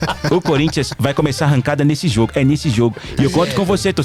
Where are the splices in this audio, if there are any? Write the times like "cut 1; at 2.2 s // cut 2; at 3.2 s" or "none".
none